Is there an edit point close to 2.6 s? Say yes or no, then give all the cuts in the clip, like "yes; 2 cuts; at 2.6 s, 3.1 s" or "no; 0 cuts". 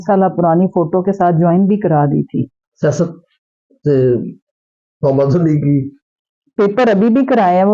yes; 1 cut; at 2.6 s